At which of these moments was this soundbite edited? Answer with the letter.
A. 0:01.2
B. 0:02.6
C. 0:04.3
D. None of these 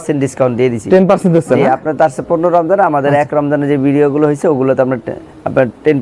D